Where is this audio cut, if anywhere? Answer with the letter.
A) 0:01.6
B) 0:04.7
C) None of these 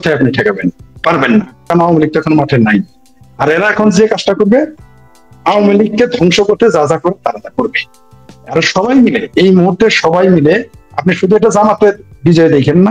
A